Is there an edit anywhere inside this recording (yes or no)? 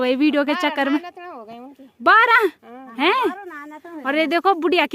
no